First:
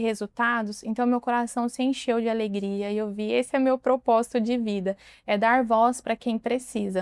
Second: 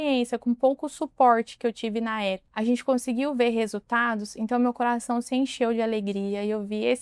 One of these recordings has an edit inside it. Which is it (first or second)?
second